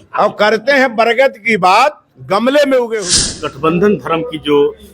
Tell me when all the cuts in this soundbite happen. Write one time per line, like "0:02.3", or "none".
0:03.4